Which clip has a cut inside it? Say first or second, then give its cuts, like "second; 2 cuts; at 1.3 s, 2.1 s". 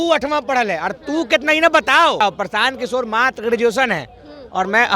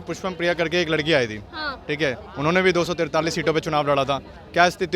first; 1 cut; at 2.2 s